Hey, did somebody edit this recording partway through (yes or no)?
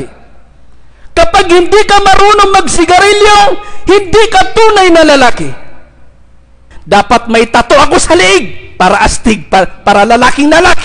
yes